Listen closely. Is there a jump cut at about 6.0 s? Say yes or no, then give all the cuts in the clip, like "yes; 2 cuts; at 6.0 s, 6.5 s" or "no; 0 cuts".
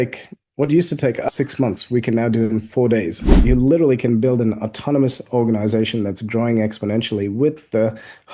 no; 2 cuts; at 1.3 s, 3.4 s